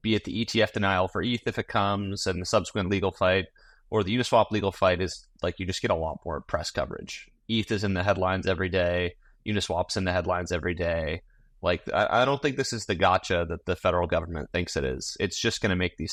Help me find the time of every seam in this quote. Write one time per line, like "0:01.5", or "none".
none